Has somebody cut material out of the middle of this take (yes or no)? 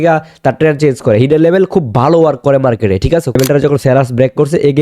yes